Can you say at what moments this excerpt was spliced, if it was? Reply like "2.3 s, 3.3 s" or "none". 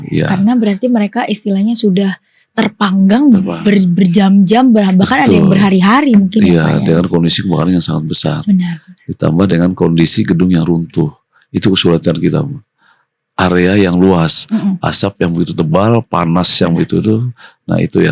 none